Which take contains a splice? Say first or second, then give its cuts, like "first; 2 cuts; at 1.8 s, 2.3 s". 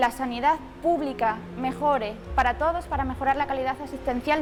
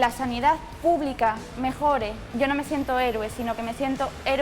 second; 1 cut; at 2.2 s